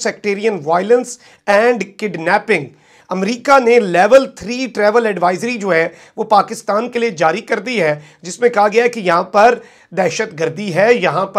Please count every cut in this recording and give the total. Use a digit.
0